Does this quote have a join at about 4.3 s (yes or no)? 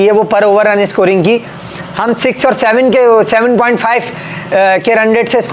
no